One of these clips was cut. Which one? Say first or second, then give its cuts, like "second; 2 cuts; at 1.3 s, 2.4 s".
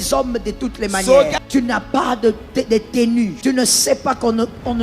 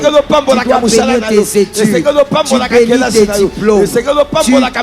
first; 2 cuts; at 1.4 s, 3.4 s